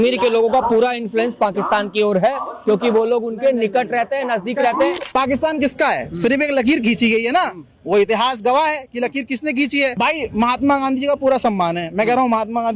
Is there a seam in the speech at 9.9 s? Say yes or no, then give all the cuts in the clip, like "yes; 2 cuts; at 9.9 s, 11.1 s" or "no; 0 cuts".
yes; 2 cuts; at 5.0 s, 9.9 s